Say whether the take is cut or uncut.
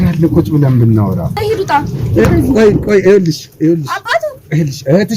cut